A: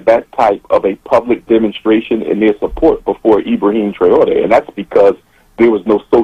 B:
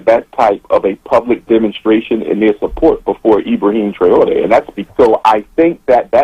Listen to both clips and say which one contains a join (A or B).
B